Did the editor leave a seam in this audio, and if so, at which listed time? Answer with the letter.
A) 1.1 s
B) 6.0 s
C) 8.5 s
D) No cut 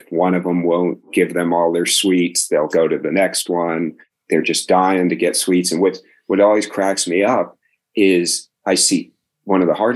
A